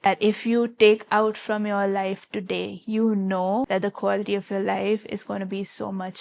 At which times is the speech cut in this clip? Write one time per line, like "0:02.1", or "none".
none